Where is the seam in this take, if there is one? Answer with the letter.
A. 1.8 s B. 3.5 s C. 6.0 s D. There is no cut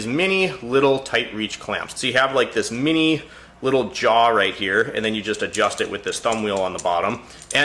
A